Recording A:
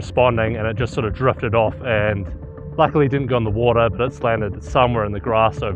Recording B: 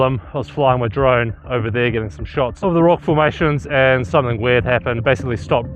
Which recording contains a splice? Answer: B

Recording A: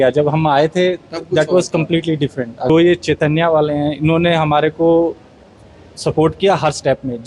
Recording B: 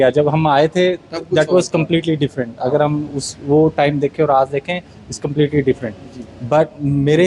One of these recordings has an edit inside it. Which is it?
A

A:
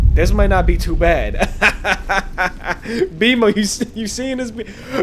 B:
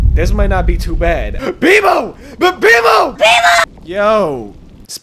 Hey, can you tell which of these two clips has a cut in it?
B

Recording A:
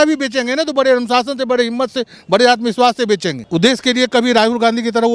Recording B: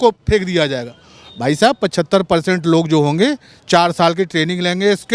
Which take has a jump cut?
A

